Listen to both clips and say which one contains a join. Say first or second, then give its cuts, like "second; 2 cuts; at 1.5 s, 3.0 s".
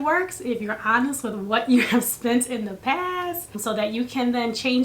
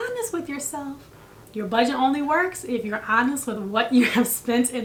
first; 1 cut; at 3.6 s